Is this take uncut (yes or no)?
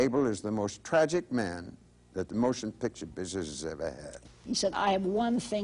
no